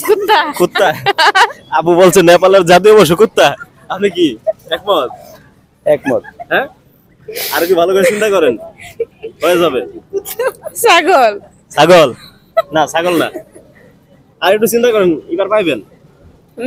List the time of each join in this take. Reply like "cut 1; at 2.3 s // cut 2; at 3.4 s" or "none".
none